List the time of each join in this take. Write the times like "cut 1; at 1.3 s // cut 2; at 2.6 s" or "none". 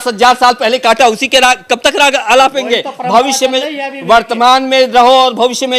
none